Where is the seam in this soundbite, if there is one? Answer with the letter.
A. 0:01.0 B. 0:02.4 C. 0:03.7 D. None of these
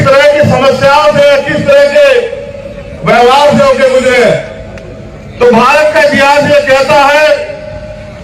A